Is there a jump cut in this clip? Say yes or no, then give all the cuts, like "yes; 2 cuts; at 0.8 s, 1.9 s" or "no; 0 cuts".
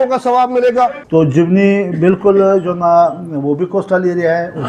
yes; 1 cut; at 1.0 s